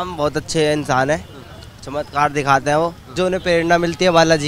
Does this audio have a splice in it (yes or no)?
yes